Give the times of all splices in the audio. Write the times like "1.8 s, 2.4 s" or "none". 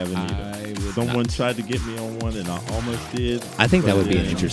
3.5 s